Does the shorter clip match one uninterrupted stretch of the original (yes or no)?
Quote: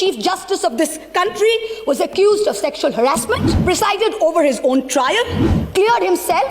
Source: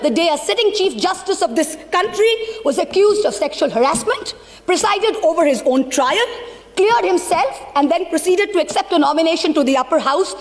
no